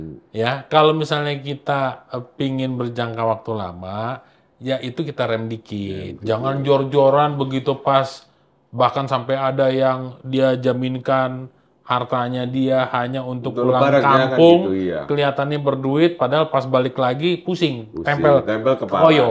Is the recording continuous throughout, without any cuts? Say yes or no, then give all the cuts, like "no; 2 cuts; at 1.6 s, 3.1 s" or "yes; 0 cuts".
yes; 0 cuts